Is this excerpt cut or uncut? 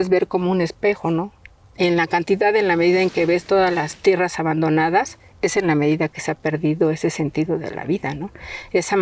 uncut